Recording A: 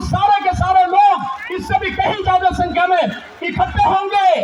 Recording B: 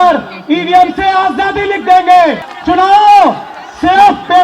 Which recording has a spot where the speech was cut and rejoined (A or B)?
B